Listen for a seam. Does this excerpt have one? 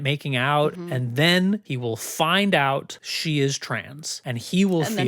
yes; 2 cuts; at 0.8 s, 1.7 s

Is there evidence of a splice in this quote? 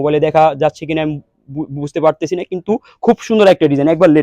no; 0 cuts

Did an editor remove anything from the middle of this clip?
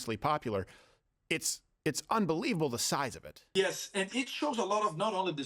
yes; 1 cut; at 3.4 s

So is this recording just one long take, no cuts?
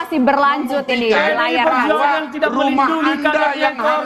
yes; 0 cuts

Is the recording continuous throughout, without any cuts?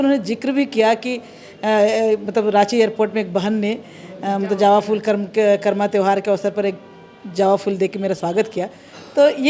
yes; 0 cuts

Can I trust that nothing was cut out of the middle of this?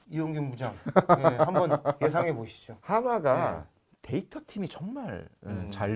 yes; 0 cuts

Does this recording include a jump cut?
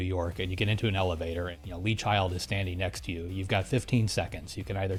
no; 0 cuts

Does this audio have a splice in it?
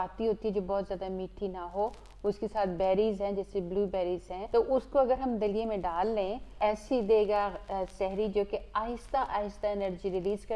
yes; 2 cuts; at 4.3 s, 6.4 s

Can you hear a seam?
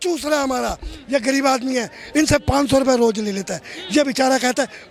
no; 0 cuts

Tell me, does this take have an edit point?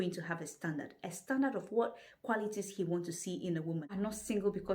yes; 1 cut; at 3.8 s

